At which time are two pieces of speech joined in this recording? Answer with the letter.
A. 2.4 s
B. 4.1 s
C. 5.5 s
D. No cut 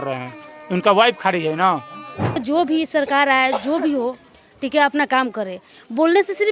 A